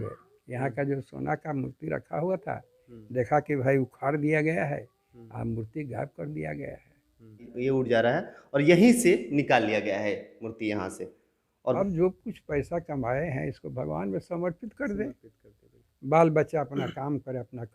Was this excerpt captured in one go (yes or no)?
no